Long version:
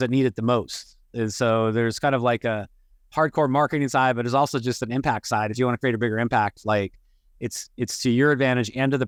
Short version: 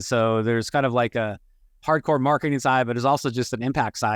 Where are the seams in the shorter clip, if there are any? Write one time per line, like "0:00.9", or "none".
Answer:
none